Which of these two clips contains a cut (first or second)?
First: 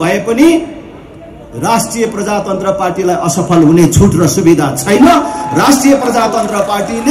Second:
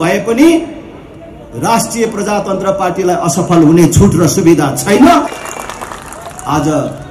second